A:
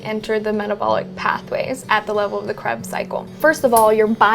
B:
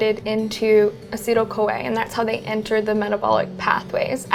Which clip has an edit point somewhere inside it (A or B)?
A